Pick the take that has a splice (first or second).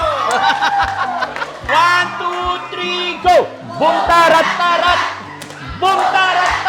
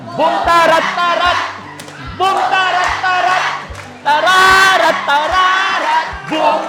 first